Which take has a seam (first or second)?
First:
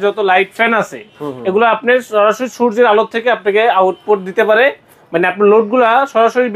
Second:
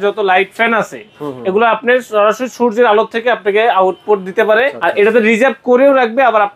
second